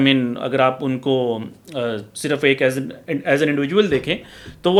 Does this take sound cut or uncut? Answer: uncut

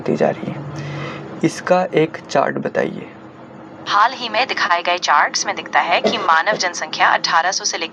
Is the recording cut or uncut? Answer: uncut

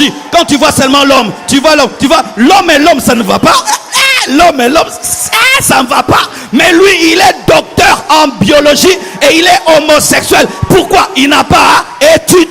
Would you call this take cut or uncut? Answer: uncut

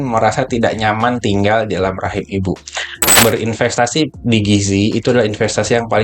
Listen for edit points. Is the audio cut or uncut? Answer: cut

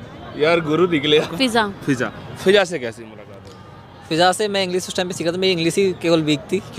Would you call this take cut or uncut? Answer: cut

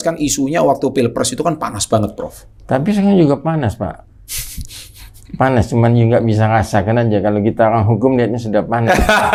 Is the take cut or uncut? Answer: uncut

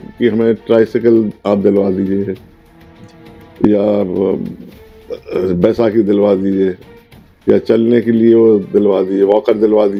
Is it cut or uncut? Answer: uncut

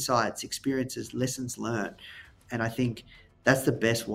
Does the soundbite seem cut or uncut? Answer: cut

